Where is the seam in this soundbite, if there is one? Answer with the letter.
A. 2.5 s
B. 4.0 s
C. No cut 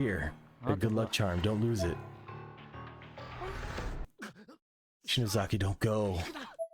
B